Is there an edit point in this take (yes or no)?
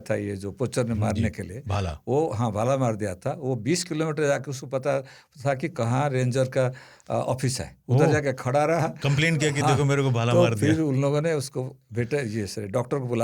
no